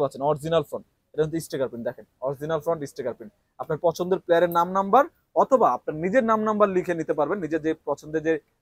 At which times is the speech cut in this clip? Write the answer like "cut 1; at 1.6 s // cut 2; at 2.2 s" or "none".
none

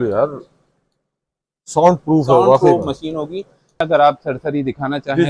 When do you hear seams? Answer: cut 1; at 3.8 s

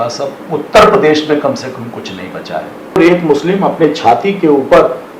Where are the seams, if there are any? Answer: cut 1; at 3.0 s

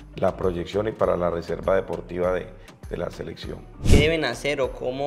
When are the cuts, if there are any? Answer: cut 1; at 3.7 s

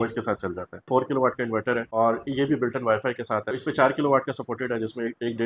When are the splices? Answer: cut 1; at 0.9 s // cut 2; at 1.9 s // cut 3; at 3.5 s

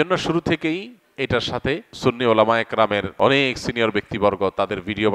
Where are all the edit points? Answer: cut 1; at 1.9 s // cut 2; at 3.1 s

